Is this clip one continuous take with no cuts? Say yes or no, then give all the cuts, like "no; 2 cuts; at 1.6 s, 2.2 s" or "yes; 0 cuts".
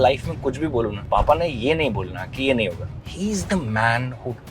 no; 2 cuts; at 1.0 s, 3.0 s